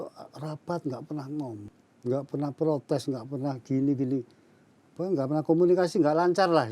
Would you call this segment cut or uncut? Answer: cut